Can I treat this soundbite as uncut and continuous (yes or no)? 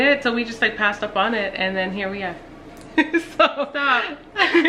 yes